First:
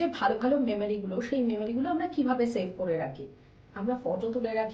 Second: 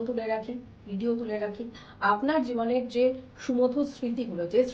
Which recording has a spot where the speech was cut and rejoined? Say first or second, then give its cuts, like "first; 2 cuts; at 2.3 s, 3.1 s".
second; 1 cut; at 1.8 s